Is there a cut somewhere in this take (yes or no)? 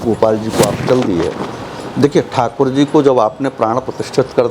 no